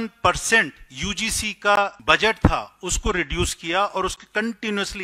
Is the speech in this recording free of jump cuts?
no; 1 cut; at 2.0 s

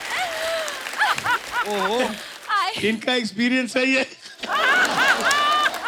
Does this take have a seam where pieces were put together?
no; 0 cuts

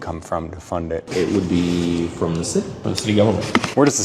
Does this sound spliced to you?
yes; 2 cuts; at 1.0 s, 2.8 s

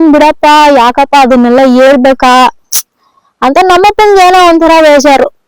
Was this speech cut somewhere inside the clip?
no; 0 cuts

